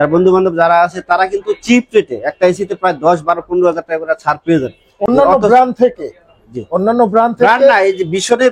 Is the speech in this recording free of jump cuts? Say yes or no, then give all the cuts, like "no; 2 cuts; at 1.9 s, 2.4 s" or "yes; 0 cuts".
yes; 0 cuts